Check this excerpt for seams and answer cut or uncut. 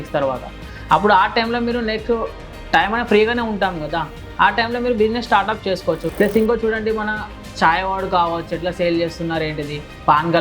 cut